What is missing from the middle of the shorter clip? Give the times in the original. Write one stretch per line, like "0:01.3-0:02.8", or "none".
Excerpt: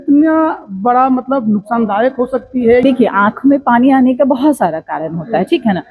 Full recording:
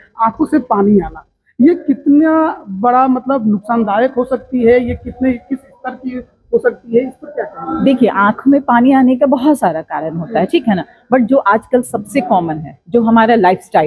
0:04.8-0:07.8